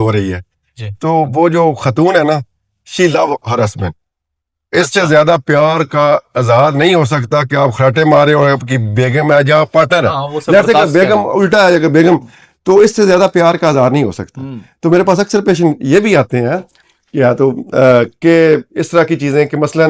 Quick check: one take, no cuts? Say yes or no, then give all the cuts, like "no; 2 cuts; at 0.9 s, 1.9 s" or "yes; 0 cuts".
yes; 0 cuts